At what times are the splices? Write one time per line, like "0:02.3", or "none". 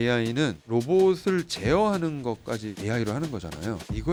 none